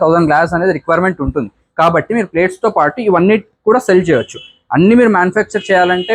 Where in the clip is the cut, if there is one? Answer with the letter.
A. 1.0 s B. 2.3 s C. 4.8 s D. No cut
D